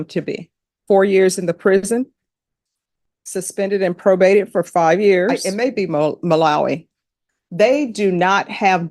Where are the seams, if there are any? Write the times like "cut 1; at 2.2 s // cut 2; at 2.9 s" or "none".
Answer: cut 1; at 0.8 s // cut 2; at 5.4 s

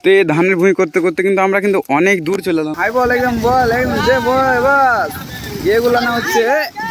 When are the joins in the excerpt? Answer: cut 1; at 2.7 s

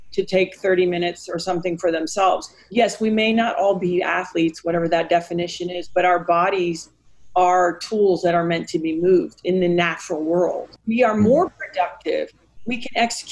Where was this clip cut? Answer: cut 1; at 2.6 s // cut 2; at 10.7 s

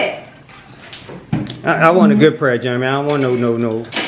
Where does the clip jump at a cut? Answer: none

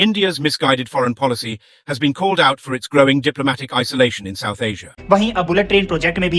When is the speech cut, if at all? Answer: cut 1; at 5.0 s

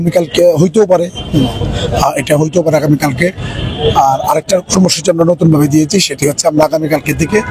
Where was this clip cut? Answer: none

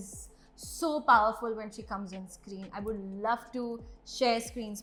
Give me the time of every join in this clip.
none

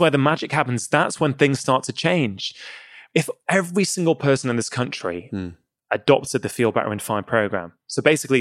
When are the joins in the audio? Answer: cut 1; at 3.0 s

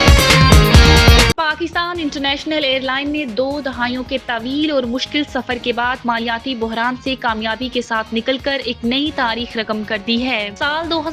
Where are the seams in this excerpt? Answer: cut 1; at 1.3 s

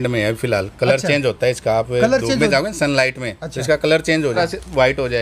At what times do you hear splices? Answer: none

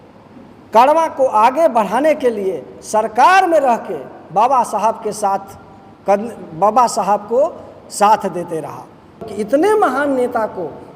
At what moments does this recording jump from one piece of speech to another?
cut 1; at 9.3 s

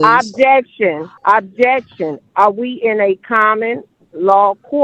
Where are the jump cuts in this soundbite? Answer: cut 1; at 1.1 s

